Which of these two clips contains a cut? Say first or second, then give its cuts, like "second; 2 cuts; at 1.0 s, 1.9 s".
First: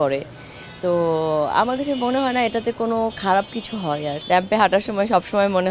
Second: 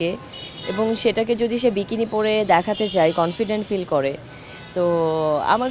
first; 1 cut; at 4.2 s